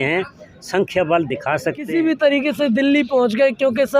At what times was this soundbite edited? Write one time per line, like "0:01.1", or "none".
0:01.8